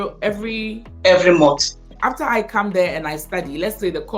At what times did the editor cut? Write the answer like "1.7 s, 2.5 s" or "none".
1.9 s